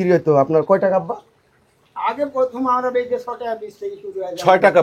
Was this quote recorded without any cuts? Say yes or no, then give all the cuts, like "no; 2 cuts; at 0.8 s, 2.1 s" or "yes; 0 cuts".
yes; 0 cuts